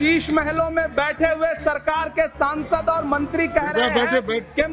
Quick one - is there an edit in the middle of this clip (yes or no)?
no